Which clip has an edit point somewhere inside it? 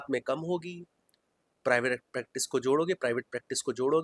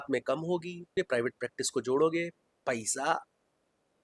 second; 1 cut; at 0.9 s

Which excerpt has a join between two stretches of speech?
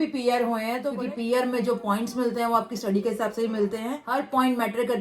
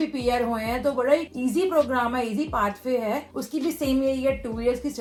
first; 2 cuts; at 0.9 s, 4.0 s

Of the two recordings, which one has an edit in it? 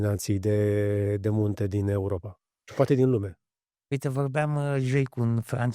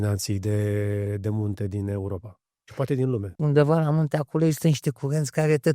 second; 1 cut; at 3.3 s

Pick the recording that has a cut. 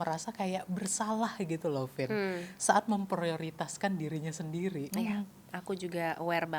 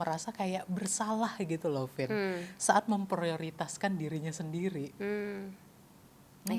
first; 1 cut; at 4.9 s

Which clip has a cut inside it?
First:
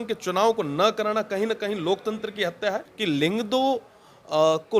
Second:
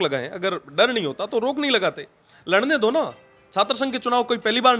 first; 1 cut; at 2.9 s

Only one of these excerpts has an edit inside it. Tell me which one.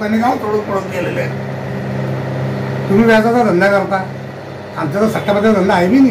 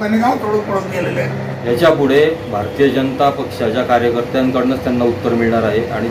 second; 1 cut; at 1.5 s

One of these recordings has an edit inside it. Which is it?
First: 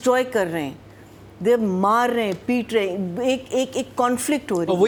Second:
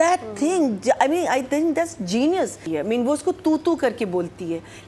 second; 1 cut; at 2.6 s

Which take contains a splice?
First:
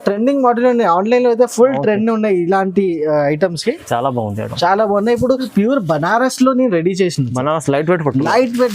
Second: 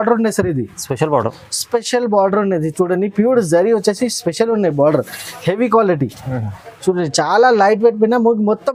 first; 1 cut; at 5.5 s

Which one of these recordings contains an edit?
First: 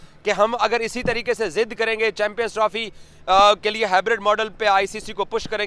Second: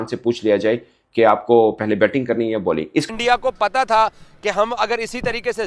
second; 1 cut; at 3.1 s

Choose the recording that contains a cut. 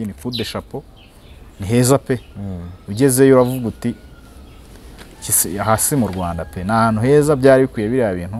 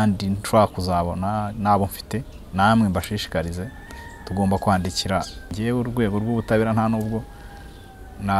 second; 1 cut; at 5.5 s

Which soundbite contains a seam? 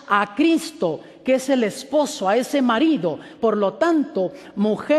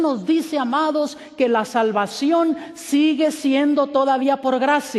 first; 1 cut; at 1.4 s

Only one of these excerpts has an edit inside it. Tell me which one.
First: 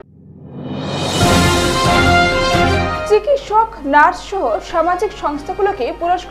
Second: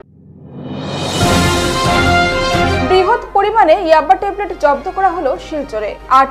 first; 1 cut; at 2.7 s

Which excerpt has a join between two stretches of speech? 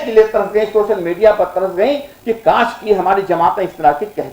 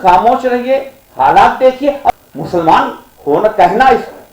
second; 1 cut; at 2.1 s

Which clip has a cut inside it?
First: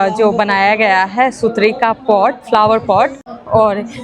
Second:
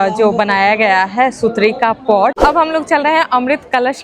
second; 1 cut; at 2.4 s

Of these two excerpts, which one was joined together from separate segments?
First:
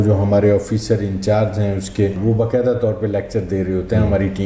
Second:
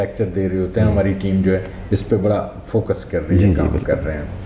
first; 1 cut; at 2.2 s

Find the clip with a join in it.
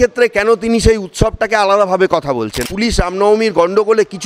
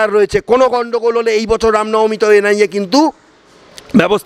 first; 1 cut; at 2.6 s

